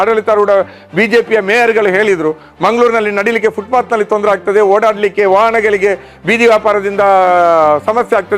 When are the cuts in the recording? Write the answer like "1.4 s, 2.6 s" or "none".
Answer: 2.5 s